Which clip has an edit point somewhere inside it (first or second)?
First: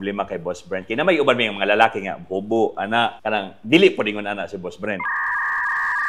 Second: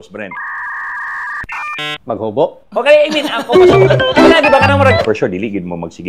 second